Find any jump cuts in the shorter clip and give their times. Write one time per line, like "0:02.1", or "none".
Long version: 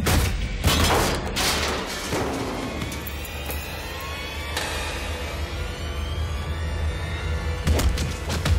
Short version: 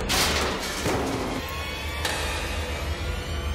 0:01.4